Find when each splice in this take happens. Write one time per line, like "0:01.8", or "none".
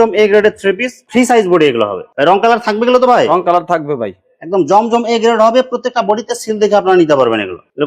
none